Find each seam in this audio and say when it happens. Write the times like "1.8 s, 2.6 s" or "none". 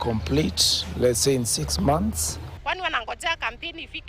2.6 s